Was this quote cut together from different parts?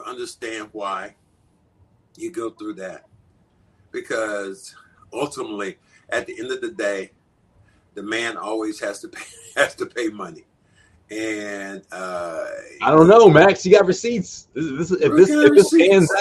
no; 0 cuts

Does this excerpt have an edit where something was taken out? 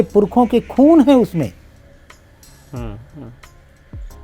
no; 0 cuts

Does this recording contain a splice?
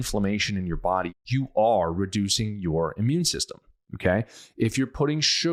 no; 0 cuts

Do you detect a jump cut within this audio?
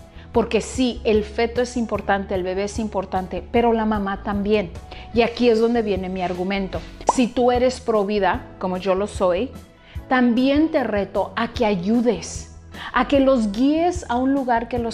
yes; 1 cut; at 6.9 s

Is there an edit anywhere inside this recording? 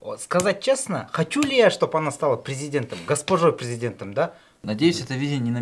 yes; 1 cut; at 4.6 s

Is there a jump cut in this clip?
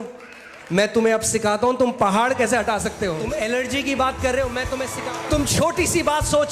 yes; 2 cuts; at 3.2 s, 4.9 s

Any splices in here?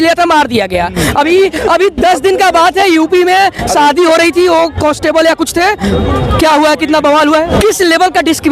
yes; 1 cut; at 7.5 s

